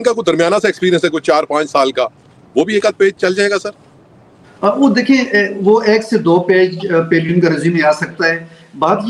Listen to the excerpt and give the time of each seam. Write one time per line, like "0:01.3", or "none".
none